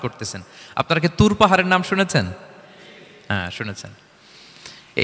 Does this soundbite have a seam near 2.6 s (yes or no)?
no